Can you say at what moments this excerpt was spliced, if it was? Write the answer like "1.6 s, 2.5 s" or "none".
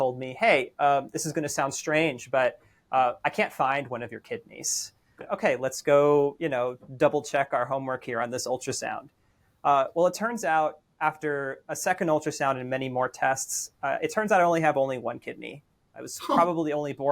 5.2 s

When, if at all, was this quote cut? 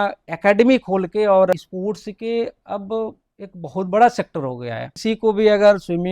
1.5 s, 4.9 s

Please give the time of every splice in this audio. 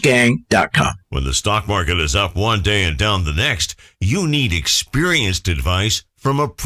1.2 s

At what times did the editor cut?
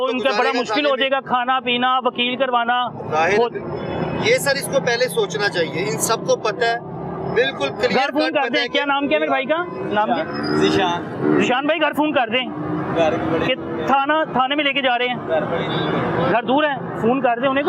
none

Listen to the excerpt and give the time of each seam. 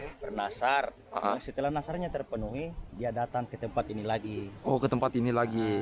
4.5 s

